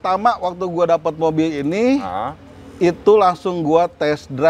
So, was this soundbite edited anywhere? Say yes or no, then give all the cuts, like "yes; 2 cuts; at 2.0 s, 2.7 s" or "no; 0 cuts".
no; 0 cuts